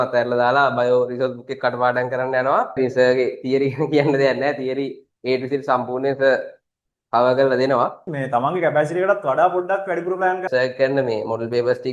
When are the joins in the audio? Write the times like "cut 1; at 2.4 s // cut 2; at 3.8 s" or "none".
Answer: cut 1; at 2.8 s // cut 2; at 8.1 s // cut 3; at 10.4 s